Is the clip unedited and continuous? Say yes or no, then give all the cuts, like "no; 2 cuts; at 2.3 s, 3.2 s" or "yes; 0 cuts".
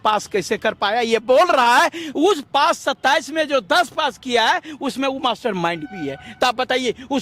yes; 0 cuts